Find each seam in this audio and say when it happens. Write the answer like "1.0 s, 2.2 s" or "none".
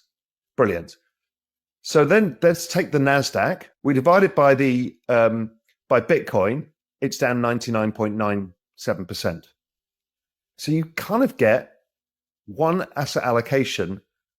3.7 s